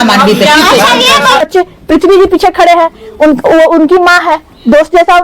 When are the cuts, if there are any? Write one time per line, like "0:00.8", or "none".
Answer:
0:01.4